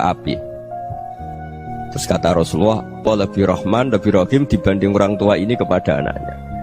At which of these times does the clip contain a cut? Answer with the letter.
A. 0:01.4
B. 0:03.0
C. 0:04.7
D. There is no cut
B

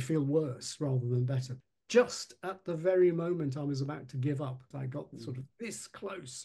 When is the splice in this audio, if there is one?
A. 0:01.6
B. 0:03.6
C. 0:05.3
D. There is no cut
A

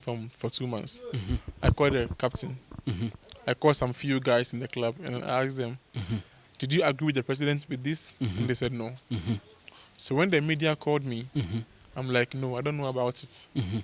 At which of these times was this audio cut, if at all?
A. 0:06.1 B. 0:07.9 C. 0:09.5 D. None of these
D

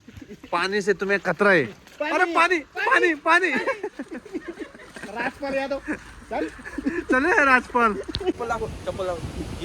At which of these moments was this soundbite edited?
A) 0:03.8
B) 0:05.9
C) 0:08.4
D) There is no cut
C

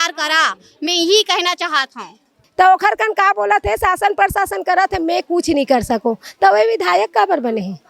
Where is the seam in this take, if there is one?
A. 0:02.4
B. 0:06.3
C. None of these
A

